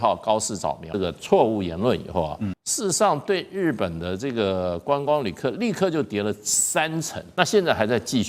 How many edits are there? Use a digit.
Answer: 3